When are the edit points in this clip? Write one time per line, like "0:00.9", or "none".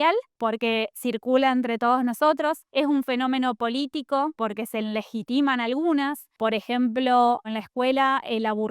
0:02.6
0:04.3
0:06.2
0:07.5